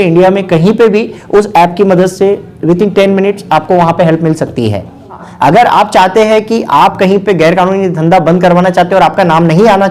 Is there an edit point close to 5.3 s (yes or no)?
yes